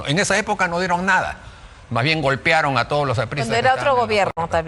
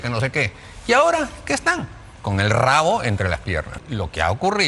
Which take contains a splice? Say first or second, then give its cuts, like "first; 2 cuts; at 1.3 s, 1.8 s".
second; 1 cut; at 3.7 s